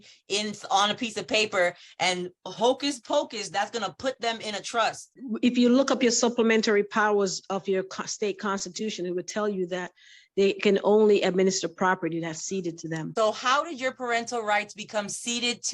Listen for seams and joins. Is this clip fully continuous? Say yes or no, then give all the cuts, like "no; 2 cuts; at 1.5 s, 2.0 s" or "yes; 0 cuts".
no; 2 cuts; at 5.1 s, 13.1 s